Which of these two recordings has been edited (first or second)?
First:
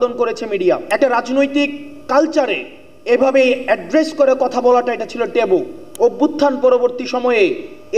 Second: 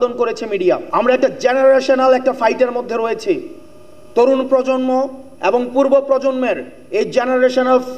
first